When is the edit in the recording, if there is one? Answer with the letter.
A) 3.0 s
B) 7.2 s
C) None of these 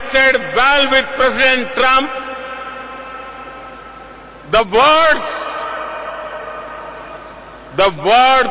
B